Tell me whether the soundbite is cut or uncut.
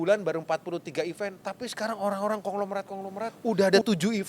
cut